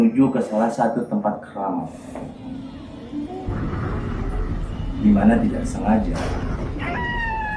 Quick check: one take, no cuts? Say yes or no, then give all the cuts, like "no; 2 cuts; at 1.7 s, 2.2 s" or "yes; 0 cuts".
yes; 0 cuts